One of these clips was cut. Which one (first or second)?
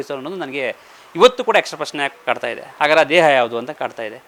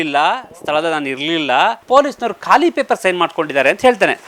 second